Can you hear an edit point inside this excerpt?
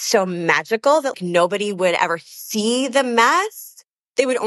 yes; 1 cut; at 1.1 s

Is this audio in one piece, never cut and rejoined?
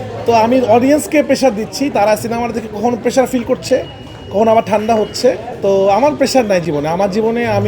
no; 1 cut; at 5.5 s

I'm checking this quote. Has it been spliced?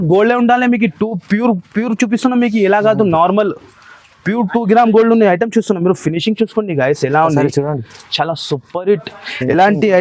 no; 0 cuts

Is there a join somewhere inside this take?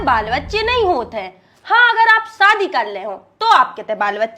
no; 0 cuts

